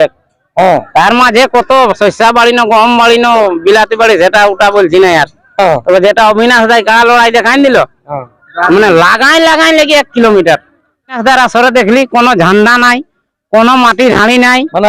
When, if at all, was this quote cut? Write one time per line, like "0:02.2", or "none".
0:11.2